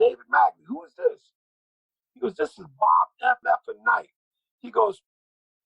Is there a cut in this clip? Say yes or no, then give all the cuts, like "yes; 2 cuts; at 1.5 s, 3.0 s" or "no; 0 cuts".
yes; 1 cut; at 3.4 s